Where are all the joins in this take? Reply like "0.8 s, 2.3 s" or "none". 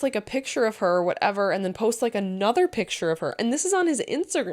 none